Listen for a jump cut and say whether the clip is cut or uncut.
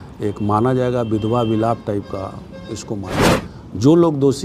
cut